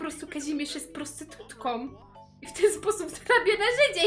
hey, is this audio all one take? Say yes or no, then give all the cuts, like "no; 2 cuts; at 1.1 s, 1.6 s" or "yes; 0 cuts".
yes; 0 cuts